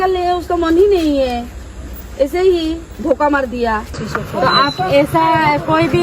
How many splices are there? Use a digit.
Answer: 1